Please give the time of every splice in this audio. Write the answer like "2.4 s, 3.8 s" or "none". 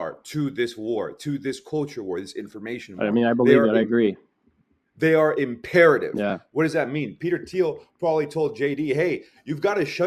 none